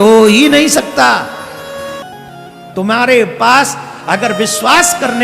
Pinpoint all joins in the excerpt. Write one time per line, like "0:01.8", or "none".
0:02.0